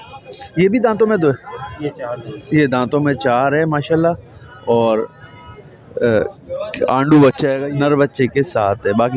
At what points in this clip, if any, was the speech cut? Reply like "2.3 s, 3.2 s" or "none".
7.7 s